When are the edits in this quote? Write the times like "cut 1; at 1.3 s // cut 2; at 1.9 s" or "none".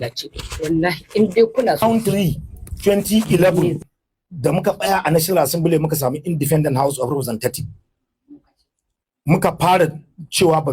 cut 1; at 1.8 s